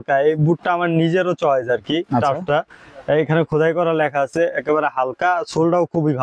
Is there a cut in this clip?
no; 0 cuts

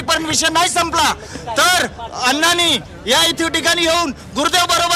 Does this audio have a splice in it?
no; 0 cuts

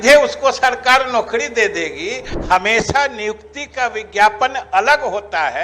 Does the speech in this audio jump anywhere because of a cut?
yes; 1 cut; at 2.3 s

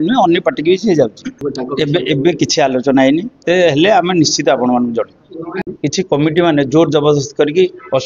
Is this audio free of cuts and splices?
no; 2 cuts; at 1.4 s, 5.7 s

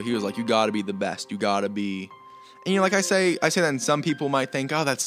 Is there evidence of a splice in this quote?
no; 0 cuts

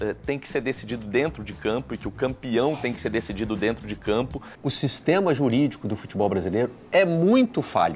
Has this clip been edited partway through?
yes; 1 cut; at 4.4 s

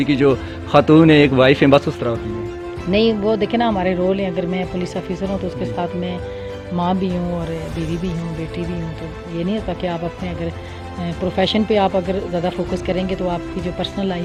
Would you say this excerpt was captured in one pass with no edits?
yes; 0 cuts

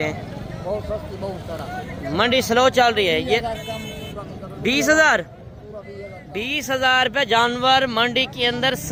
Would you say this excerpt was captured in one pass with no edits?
yes; 0 cuts

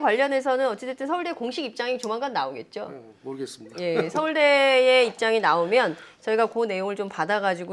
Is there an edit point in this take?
yes; 1 cut; at 1.4 s

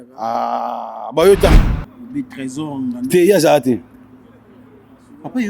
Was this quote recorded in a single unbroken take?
no; 1 cut; at 1.6 s

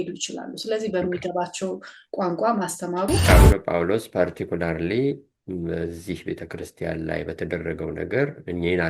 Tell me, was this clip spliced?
yes; 1 cut; at 3.3 s

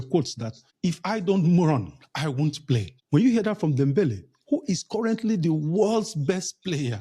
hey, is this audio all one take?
yes; 0 cuts

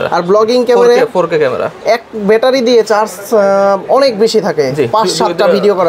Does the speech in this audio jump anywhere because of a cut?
no; 0 cuts

